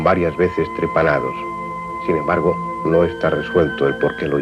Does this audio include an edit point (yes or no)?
yes